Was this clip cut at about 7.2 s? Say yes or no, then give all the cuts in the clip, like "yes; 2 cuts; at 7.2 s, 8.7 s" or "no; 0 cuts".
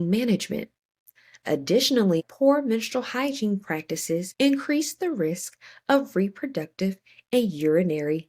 no; 2 cuts; at 2.2 s, 4.3 s